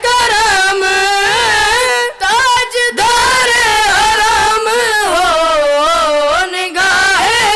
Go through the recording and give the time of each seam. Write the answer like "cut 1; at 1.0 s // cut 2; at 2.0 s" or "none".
none